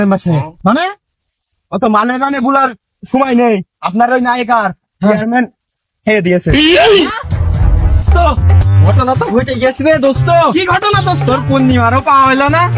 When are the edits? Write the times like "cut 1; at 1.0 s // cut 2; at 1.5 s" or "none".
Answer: cut 1; at 8.1 s